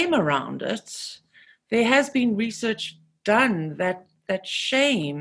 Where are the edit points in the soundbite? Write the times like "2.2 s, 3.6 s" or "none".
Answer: none

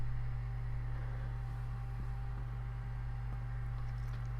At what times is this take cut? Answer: 2.2 s

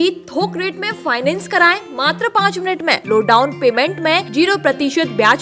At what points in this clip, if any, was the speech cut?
3.0 s, 4.3 s

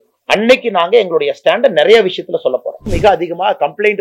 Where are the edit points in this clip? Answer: 2.9 s

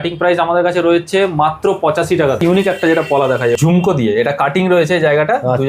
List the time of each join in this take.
2.4 s, 3.6 s

